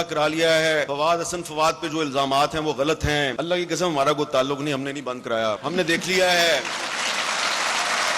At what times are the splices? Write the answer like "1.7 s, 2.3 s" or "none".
0.9 s, 3.4 s, 5.6 s